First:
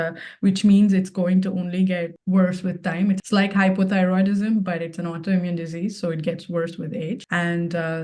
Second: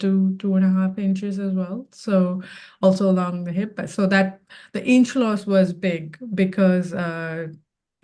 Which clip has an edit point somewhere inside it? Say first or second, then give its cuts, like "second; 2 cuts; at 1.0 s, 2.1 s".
first; 3 cuts; at 2.1 s, 3.2 s, 7.2 s